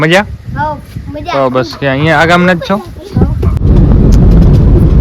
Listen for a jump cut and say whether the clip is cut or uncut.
cut